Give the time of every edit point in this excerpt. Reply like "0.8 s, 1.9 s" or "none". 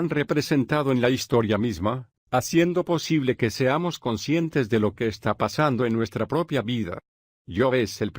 2.0 s